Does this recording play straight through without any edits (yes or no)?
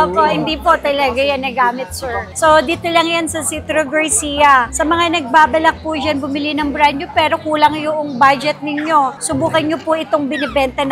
yes